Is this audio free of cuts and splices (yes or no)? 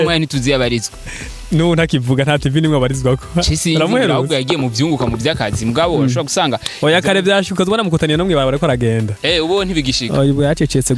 yes